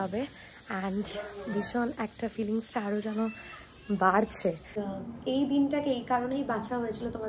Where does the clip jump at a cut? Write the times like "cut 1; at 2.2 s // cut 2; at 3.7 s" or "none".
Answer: cut 1; at 4.7 s